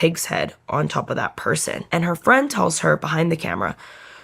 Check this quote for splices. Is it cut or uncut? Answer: cut